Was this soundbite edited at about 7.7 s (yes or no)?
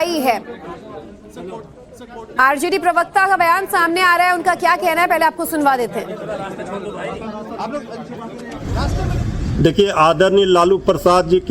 yes